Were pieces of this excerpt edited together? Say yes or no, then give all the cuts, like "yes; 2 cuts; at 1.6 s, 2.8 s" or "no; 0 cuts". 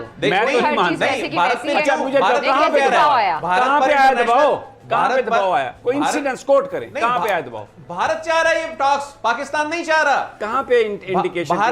no; 0 cuts